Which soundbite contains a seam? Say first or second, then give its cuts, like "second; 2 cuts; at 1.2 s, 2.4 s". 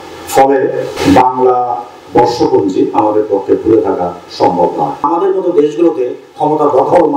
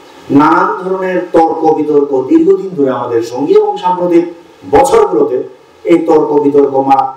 first; 2 cuts; at 0.9 s, 5.1 s